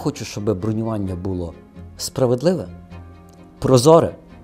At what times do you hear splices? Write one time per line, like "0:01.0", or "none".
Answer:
none